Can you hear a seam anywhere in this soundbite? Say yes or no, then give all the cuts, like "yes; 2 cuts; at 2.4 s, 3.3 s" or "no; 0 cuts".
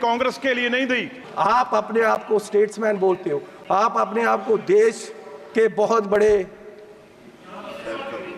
yes; 1 cut; at 1.2 s